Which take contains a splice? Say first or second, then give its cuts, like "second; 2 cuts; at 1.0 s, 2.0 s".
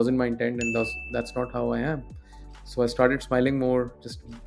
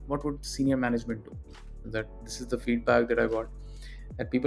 second; 1 cut; at 1.7 s